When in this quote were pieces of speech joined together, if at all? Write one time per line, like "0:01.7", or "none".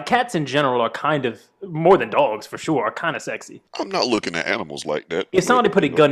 0:03.6